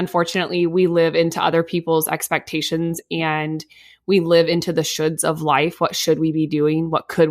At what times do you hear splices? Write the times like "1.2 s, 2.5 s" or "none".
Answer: none